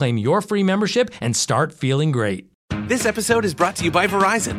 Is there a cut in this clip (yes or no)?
yes